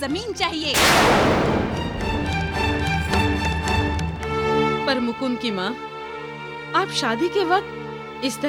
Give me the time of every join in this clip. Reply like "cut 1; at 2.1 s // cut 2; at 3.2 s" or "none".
none

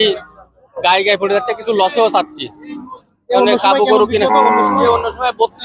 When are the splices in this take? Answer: none

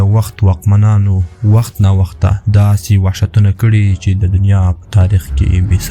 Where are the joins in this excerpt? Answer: none

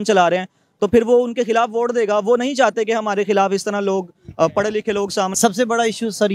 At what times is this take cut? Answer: cut 1; at 5.4 s

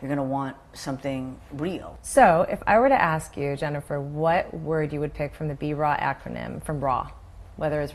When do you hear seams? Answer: none

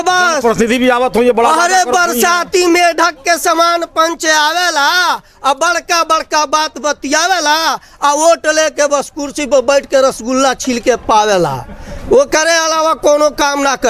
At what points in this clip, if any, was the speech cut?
none

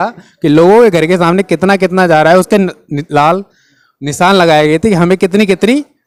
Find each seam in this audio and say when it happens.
none

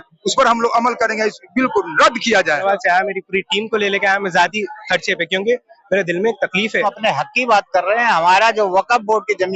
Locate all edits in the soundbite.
cut 1; at 2.6 s // cut 2; at 6.8 s

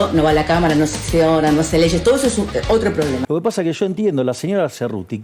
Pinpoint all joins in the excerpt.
cut 1; at 3.2 s

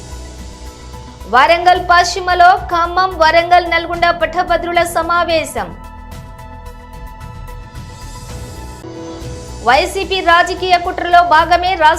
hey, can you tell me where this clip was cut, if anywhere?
none

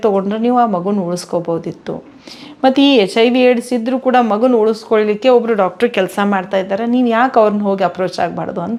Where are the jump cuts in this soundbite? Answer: none

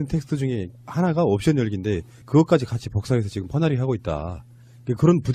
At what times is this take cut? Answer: cut 1; at 3.4 s

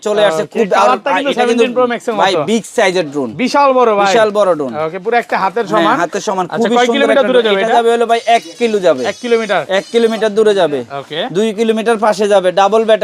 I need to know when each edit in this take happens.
none

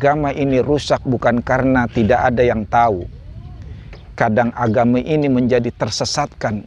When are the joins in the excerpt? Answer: none

